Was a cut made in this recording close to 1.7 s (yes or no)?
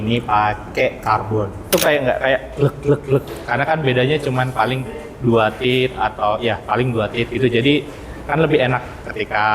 yes